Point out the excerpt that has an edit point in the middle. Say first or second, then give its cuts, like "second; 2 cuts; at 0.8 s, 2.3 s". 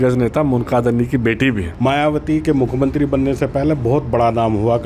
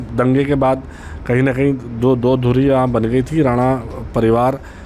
first; 1 cut; at 1.7 s